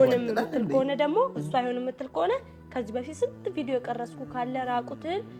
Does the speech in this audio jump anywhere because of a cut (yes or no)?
no